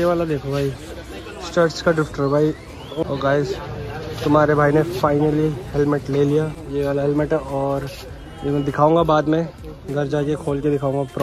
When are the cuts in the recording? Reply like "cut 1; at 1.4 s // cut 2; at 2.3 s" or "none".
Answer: cut 1; at 3.0 s // cut 2; at 6.6 s